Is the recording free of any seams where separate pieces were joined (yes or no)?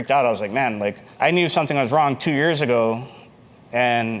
yes